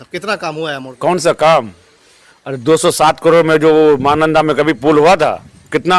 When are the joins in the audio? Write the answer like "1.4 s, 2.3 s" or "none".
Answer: 0.9 s